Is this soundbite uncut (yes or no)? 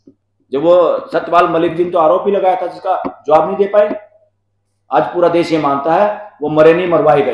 yes